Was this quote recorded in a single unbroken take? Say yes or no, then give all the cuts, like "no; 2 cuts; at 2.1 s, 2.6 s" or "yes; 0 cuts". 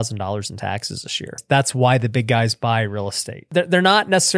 no; 2 cuts; at 1.4 s, 3.5 s